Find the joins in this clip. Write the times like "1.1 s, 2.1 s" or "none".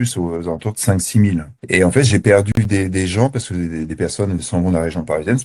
none